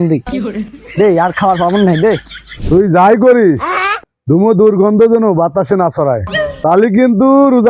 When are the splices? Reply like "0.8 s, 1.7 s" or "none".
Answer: 2.6 s